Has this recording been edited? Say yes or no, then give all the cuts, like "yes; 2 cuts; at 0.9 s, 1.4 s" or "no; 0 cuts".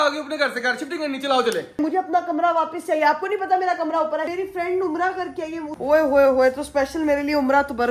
yes; 3 cuts; at 1.8 s, 4.3 s, 5.7 s